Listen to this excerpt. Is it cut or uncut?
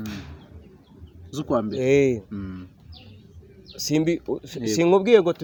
uncut